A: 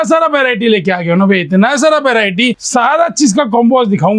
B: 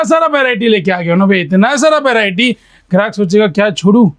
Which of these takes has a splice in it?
A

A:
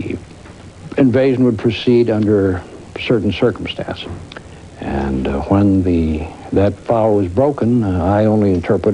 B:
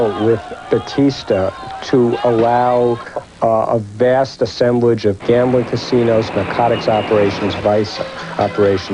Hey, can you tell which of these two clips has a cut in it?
B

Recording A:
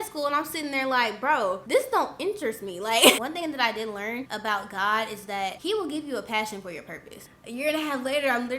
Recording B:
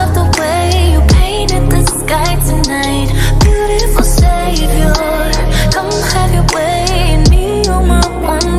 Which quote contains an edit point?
A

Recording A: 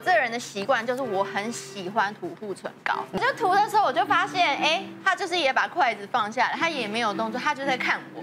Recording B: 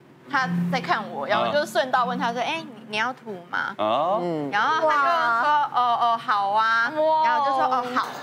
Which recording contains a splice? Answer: A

